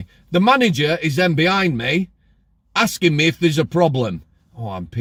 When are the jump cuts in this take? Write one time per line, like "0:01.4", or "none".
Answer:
none